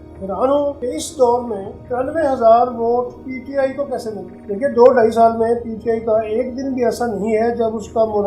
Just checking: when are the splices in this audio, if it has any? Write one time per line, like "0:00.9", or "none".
0:00.8
0:01.7
0:03.3
0:04.3